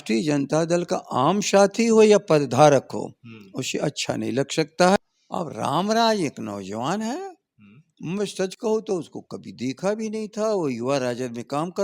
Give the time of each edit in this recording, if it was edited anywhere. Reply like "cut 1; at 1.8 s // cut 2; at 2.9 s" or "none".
cut 1; at 5.0 s